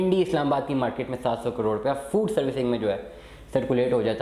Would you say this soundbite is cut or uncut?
uncut